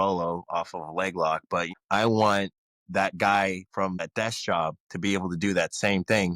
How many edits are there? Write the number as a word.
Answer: two